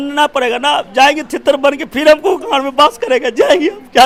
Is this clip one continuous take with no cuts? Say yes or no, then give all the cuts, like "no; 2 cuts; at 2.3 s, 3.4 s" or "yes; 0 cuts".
yes; 0 cuts